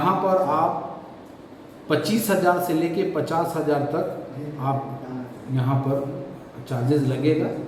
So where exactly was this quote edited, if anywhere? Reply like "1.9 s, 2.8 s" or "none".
none